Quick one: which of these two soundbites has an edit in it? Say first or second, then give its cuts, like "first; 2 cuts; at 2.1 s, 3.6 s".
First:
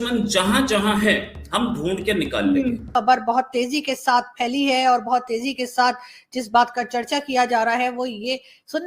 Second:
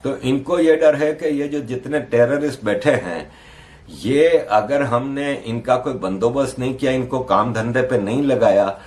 first; 1 cut; at 2.9 s